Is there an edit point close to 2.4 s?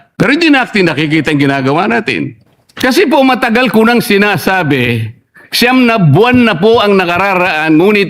yes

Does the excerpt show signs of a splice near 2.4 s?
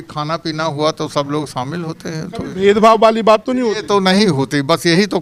no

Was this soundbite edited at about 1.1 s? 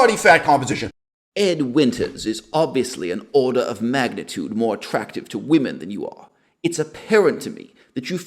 yes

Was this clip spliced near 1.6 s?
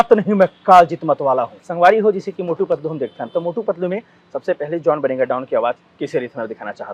yes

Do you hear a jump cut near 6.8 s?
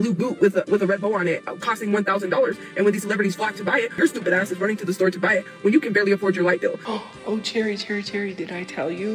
yes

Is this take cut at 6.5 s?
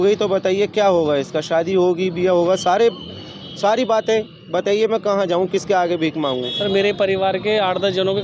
yes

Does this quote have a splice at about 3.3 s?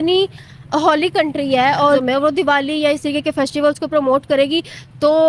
no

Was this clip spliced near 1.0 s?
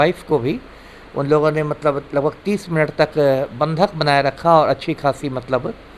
no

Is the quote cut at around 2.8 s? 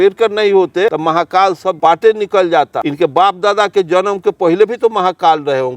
yes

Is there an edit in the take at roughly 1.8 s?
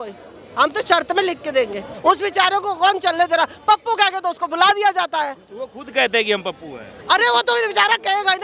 yes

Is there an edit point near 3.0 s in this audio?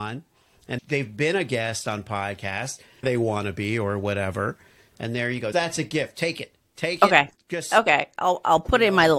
yes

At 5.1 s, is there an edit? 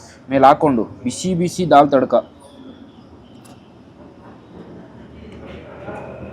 no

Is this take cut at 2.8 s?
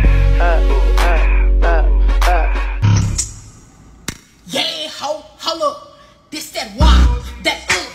yes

